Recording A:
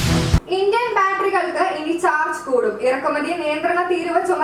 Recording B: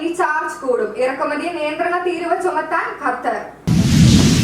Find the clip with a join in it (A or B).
B